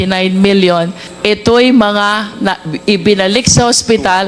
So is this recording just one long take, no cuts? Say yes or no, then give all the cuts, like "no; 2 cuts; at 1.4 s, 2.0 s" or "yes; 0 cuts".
no; 1 cut; at 1.1 s